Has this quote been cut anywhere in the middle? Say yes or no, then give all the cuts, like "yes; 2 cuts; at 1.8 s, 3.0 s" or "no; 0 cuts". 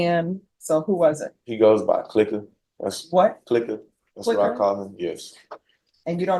no; 0 cuts